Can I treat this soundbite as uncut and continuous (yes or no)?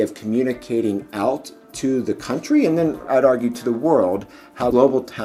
yes